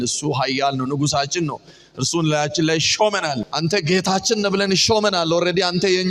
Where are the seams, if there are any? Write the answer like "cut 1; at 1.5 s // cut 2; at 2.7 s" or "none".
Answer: cut 1; at 3.5 s